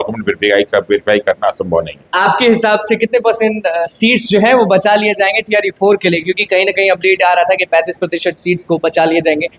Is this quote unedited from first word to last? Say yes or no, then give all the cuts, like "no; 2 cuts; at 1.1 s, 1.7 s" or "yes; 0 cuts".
yes; 0 cuts